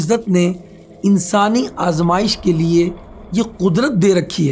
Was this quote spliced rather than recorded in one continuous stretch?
no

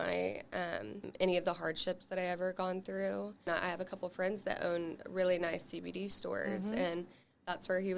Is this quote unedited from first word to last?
no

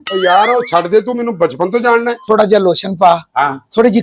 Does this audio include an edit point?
yes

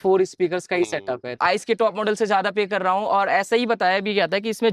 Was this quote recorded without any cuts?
no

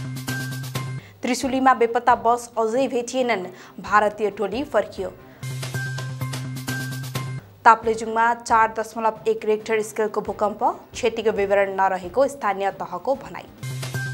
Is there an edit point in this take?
no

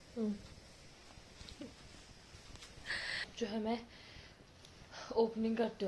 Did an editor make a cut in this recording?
yes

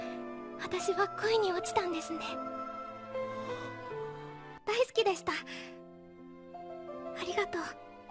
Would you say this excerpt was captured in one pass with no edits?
no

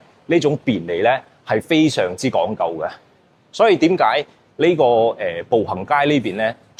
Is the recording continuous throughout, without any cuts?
yes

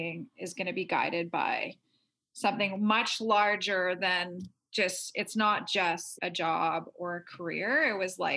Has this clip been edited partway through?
yes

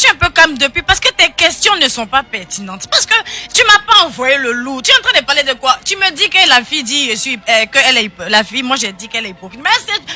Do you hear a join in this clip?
no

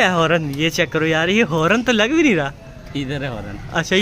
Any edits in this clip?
no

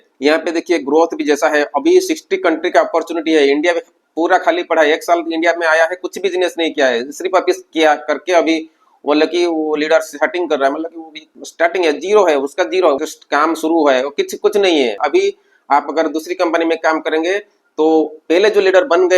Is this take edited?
yes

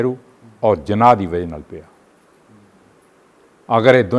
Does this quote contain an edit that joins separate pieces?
no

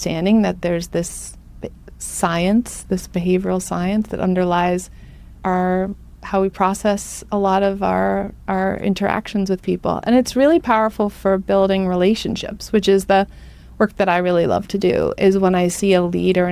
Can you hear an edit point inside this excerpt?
no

